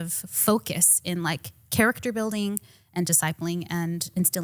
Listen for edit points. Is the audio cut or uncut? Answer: uncut